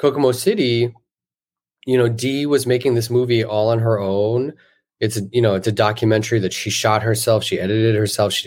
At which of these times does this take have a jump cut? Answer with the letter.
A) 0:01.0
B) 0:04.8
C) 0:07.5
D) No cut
D